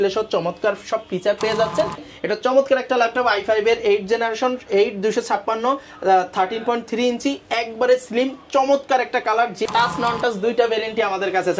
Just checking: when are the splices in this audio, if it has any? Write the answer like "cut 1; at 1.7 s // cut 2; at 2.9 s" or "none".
cut 1; at 2.1 s // cut 2; at 9.6 s